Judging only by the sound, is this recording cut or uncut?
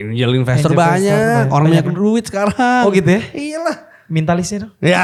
uncut